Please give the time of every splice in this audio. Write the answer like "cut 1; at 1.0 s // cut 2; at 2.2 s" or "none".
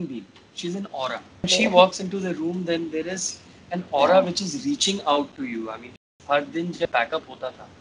cut 1; at 1.5 s // cut 2; at 5.9 s